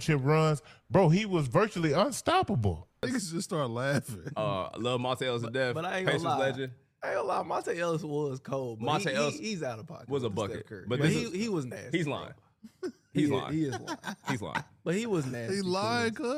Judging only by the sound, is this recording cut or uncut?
cut